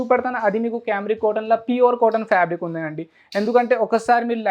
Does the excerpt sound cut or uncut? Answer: uncut